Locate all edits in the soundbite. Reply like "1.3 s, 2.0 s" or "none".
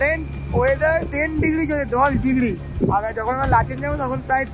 1.1 s